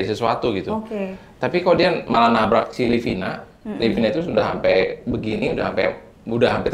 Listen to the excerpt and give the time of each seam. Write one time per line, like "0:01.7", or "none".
none